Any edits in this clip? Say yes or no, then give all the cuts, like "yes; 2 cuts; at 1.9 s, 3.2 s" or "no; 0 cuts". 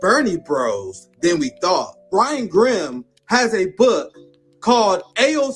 yes; 1 cut; at 2.0 s